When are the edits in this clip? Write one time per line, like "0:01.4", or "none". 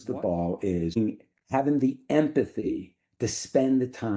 0:01.0